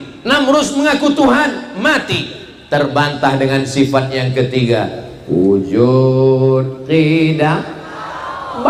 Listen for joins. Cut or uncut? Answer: uncut